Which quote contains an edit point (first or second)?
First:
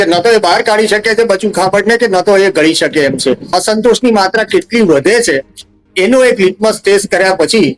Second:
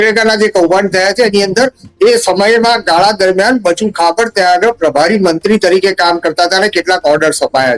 first